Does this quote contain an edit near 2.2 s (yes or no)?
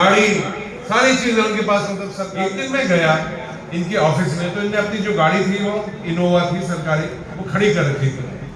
yes